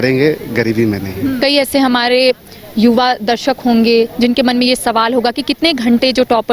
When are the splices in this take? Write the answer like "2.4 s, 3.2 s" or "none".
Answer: 1.4 s